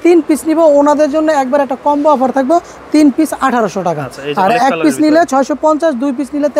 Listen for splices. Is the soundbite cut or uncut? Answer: uncut